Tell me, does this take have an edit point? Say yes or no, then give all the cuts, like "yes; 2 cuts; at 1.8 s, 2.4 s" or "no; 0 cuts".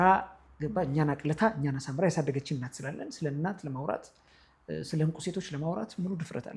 no; 0 cuts